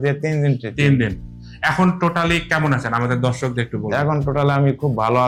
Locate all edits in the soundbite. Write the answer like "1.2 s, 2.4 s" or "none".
none